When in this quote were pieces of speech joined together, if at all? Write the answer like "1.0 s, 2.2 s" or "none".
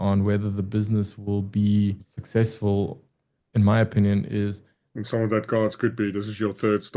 5.0 s

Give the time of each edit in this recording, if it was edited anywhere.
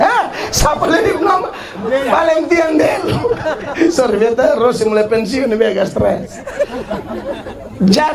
none

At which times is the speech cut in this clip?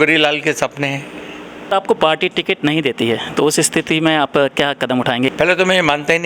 1.7 s, 5.3 s

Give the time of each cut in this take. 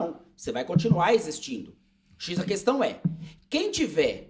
none

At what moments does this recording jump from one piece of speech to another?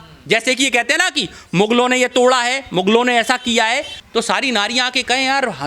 3.9 s

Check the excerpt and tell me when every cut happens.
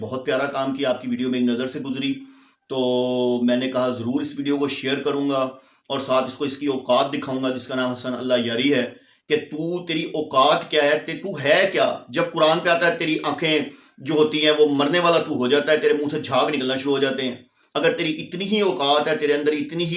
none

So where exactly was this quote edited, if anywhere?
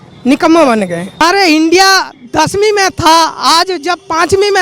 1.2 s

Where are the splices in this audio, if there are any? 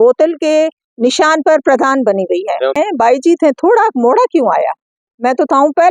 2.8 s

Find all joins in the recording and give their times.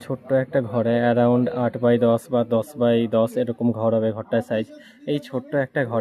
none

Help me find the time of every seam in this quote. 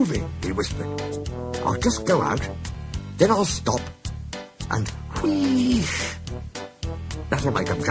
5.4 s

